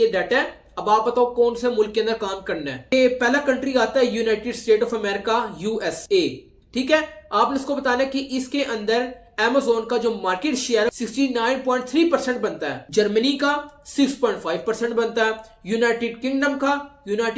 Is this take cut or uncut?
uncut